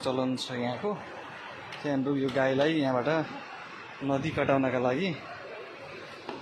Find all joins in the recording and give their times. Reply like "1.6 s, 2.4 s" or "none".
none